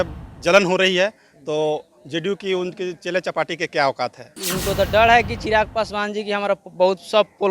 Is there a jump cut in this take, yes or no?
yes